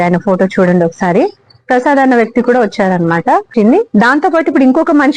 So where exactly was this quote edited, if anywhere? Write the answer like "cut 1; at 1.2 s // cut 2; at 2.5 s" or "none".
cut 1; at 3.5 s